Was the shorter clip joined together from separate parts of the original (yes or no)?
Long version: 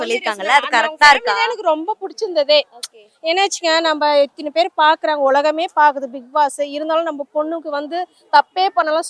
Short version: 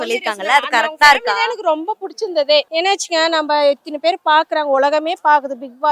yes